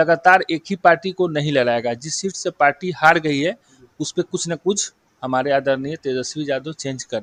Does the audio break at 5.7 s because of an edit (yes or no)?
no